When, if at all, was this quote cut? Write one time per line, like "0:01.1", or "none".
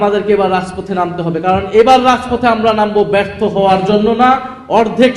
none